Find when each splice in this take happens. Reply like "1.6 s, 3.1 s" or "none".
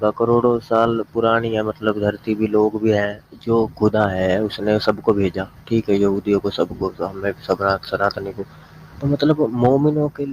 3.3 s